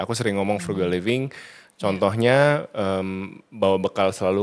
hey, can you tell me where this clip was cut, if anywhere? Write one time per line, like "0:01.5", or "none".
none